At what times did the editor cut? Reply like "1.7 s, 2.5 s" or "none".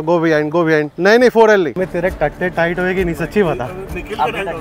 0.9 s, 1.8 s